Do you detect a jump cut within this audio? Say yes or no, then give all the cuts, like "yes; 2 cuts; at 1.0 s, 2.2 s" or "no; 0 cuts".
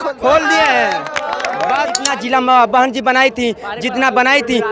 yes; 1 cut; at 2.0 s